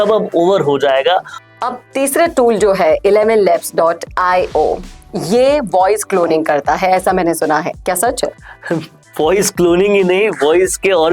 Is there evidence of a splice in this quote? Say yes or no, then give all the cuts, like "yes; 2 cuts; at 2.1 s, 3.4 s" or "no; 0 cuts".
yes; 1 cut; at 1.4 s